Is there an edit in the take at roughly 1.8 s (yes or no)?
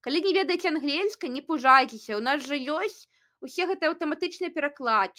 no